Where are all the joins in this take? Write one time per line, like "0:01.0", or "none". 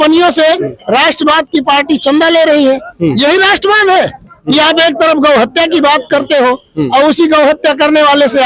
none